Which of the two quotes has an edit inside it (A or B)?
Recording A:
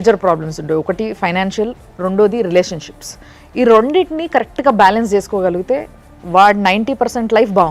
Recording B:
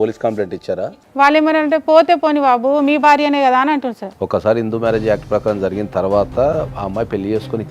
B